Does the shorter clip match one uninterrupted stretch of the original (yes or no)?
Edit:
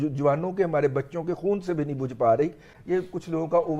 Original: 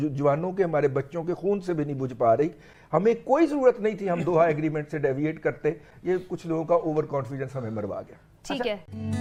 no